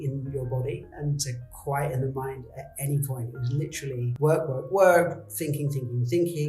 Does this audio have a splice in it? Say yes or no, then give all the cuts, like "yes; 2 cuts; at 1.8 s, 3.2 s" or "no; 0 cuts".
yes; 1 cut; at 4.1 s